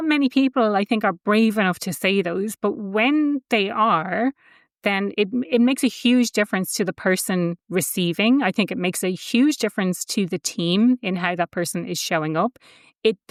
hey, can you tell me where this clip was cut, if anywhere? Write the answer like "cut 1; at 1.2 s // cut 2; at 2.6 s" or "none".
none